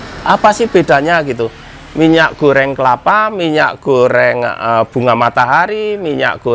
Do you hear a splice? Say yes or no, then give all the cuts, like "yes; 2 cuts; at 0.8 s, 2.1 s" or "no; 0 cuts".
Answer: no; 0 cuts